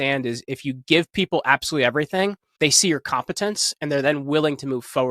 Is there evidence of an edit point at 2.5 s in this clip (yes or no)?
yes